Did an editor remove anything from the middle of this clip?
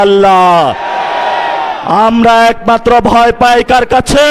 no; 0 cuts

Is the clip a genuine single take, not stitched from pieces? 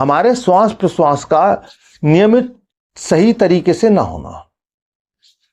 yes; 0 cuts

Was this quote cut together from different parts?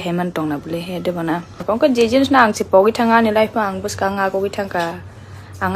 yes; 1 cut; at 1.6 s

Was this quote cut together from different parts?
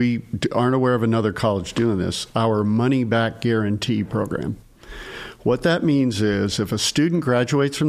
no; 0 cuts

